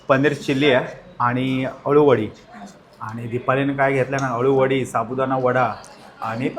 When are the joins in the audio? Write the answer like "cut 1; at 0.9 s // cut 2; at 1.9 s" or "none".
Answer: none

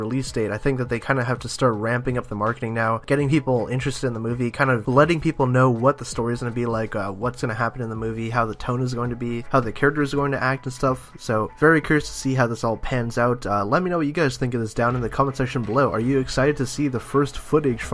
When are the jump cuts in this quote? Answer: none

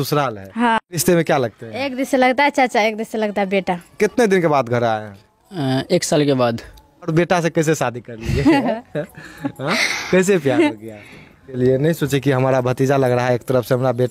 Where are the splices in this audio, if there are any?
cut 1; at 1.0 s // cut 2; at 3.9 s // cut 3; at 7.1 s // cut 4; at 11.5 s

